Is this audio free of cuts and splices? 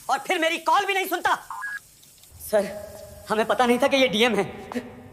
no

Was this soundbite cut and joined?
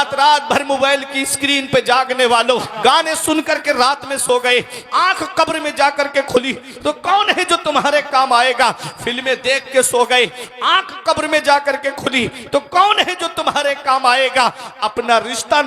yes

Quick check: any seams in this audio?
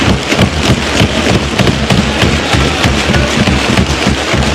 no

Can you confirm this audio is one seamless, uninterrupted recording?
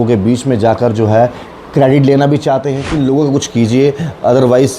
no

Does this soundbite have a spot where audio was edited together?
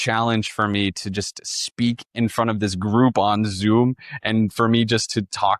no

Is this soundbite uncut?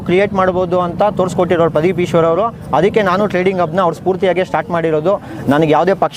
yes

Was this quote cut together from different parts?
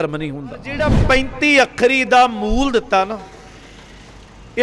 yes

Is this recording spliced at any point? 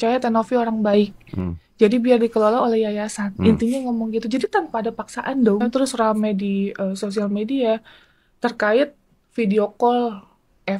yes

